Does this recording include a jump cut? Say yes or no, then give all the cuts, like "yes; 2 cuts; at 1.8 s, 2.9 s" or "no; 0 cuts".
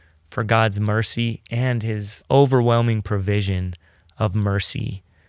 yes; 1 cut; at 2.1 s